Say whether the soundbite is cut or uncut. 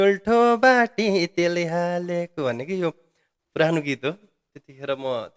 uncut